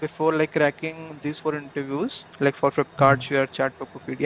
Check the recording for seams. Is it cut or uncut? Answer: uncut